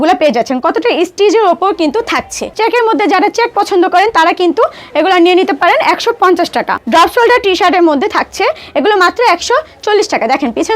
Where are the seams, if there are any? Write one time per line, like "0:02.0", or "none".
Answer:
0:02.5
0:06.8